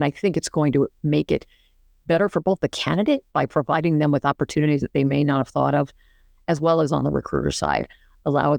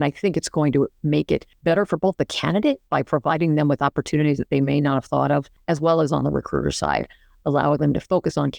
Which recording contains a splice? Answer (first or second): second